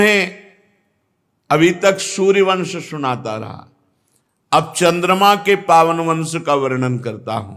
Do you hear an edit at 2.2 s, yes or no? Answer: no